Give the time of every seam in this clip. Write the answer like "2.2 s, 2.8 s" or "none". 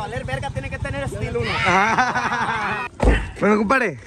1.5 s, 2.9 s